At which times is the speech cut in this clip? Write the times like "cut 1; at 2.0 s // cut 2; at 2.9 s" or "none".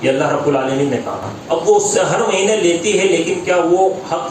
cut 1; at 1.3 s